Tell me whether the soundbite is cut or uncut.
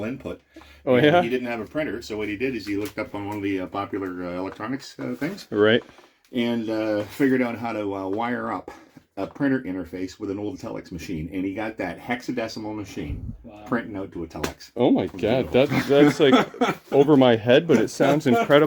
uncut